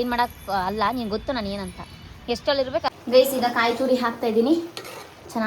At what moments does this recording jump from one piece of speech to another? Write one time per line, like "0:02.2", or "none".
0:03.0